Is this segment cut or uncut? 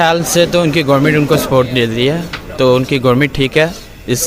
uncut